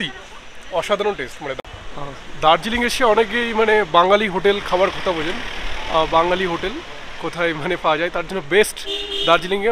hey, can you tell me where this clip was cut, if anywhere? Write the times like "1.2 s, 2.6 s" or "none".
1.6 s